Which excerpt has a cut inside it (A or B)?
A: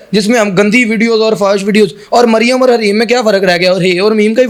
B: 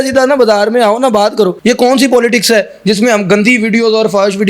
B